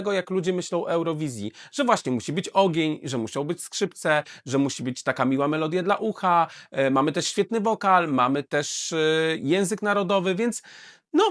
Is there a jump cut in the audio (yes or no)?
no